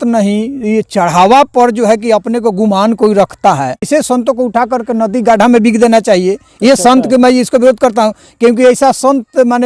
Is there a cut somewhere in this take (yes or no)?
yes